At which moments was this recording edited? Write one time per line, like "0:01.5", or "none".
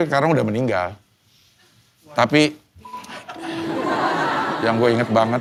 none